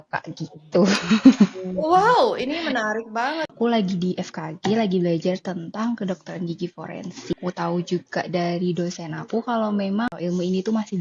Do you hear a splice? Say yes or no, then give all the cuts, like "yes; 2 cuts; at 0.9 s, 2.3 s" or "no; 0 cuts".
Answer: yes; 3 cuts; at 3.5 s, 7.4 s, 10.1 s